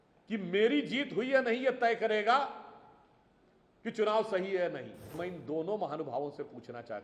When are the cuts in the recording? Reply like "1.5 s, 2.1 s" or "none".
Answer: 5.2 s